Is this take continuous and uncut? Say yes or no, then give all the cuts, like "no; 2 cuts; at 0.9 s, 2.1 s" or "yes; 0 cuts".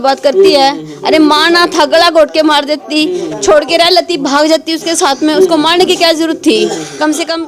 yes; 0 cuts